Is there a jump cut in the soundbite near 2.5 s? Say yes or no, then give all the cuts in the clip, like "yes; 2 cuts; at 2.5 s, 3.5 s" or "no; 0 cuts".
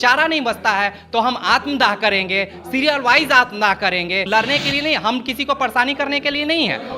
no; 1 cut; at 4.2 s